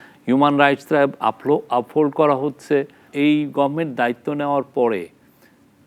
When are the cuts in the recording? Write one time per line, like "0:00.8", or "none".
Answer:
0:03.1

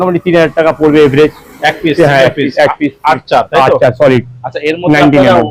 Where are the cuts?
none

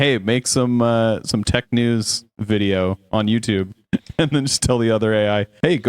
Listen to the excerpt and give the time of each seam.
none

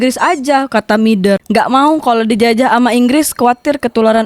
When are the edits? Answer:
0:01.4

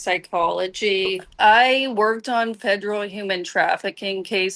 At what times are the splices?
0:01.4

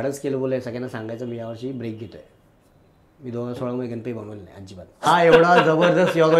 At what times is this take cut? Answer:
0:05.1

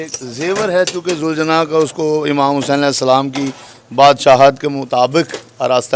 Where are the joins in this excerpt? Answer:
none

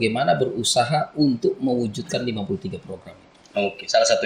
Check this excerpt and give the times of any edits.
none

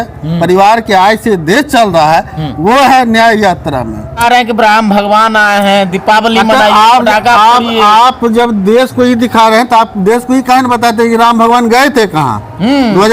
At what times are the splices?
0:04.1

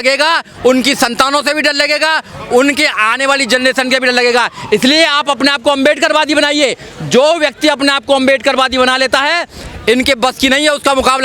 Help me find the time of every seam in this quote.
none

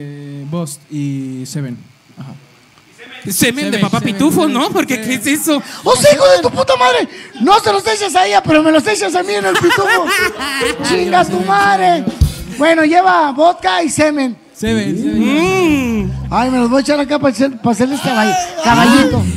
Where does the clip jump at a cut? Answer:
none

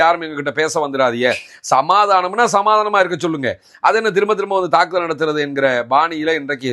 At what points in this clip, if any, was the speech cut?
none

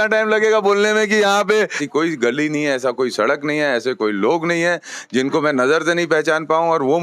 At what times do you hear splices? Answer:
0:01.8

